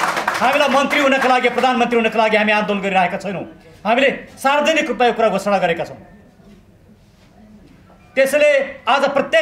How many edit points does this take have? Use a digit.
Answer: 0